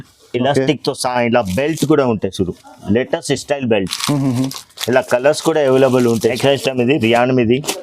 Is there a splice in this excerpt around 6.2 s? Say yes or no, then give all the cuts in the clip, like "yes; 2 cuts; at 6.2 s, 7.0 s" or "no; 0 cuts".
yes; 1 cut; at 6.2 s